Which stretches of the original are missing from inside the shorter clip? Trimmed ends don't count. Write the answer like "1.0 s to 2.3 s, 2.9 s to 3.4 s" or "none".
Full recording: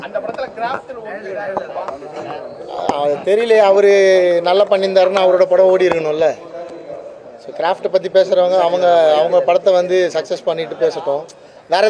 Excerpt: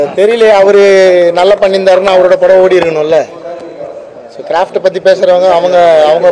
none